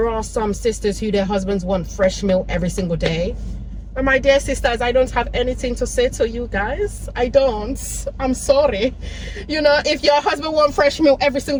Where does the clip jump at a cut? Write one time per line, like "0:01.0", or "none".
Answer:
none